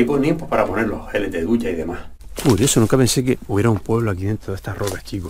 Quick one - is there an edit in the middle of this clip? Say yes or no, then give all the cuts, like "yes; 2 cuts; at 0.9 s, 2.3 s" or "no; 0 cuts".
yes; 1 cut; at 2.2 s